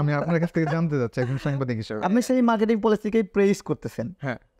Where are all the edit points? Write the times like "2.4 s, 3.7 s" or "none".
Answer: 2.0 s